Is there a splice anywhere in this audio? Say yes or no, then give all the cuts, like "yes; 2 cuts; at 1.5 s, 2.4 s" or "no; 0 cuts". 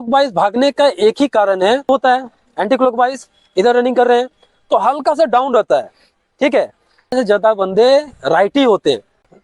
yes; 2 cuts; at 1.9 s, 7.1 s